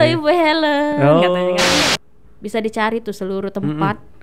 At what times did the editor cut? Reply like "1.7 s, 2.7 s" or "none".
1.9 s